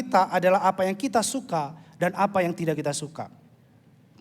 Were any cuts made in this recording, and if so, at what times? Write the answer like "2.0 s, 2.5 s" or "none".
none